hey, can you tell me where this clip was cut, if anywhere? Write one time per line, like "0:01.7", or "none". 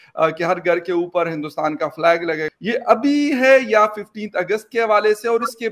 0:02.5